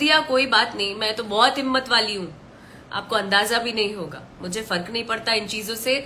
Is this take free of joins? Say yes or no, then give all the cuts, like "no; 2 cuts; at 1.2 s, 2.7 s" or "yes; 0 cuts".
yes; 0 cuts